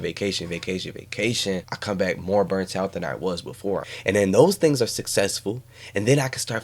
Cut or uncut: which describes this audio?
cut